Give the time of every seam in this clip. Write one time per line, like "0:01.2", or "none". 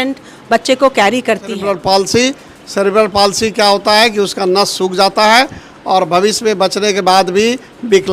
0:01.6